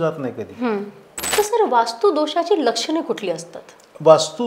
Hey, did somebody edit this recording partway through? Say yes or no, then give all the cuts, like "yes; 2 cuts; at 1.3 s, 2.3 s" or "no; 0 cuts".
yes; 1 cut; at 1.2 s